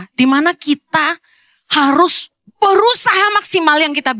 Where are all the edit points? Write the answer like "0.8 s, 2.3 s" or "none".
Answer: none